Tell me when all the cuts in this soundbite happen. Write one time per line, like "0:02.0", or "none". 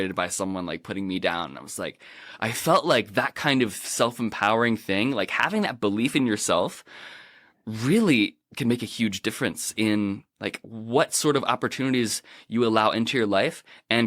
0:08.4